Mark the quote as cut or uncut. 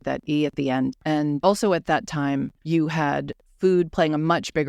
cut